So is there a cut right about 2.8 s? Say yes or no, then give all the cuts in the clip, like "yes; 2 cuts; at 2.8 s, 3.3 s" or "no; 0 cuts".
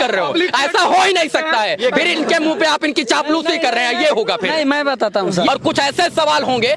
no; 1 cut; at 5.5 s